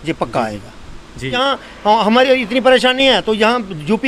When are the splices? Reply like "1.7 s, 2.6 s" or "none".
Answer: 1.4 s